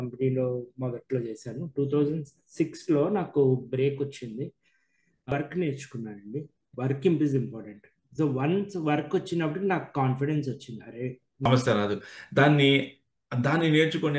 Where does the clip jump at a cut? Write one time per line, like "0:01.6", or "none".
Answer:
0:05.3
0:11.5